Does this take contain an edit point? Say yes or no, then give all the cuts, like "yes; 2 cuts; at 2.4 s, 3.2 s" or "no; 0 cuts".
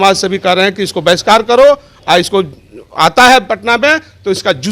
no; 0 cuts